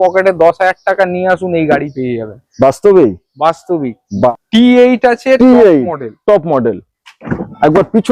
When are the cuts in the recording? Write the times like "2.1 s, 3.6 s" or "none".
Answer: 4.3 s